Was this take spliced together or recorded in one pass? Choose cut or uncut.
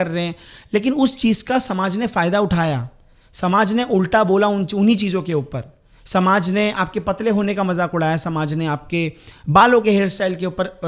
uncut